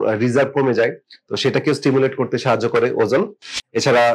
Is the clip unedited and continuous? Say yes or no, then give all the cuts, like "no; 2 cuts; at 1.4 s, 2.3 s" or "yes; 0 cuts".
yes; 0 cuts